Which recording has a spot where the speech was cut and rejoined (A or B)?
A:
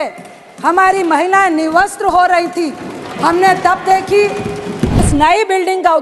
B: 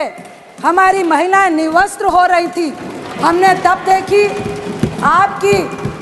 A